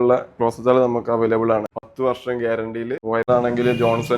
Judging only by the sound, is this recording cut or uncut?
cut